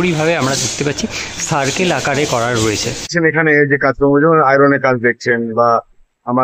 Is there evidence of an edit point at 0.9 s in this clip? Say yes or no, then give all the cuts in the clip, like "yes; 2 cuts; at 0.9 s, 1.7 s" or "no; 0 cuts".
no; 1 cut; at 3.1 s